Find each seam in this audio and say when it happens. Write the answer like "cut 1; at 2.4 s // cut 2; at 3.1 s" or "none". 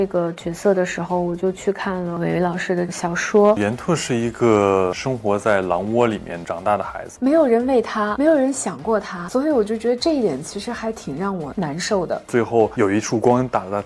cut 1; at 2.1 s // cut 2; at 2.9 s // cut 3; at 3.6 s // cut 4; at 7.0 s // cut 5; at 8.1 s // cut 6; at 12.2 s